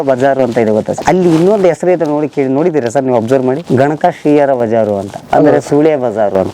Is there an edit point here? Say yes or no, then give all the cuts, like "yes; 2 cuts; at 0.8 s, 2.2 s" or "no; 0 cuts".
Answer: yes; 2 cuts; at 1.0 s, 5.1 s